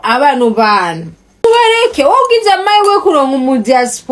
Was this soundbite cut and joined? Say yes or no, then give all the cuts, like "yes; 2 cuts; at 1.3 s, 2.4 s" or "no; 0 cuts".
yes; 1 cut; at 1.4 s